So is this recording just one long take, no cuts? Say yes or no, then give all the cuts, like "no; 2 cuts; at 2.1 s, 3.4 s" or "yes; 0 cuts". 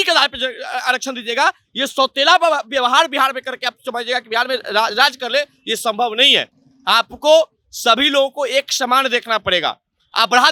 yes; 0 cuts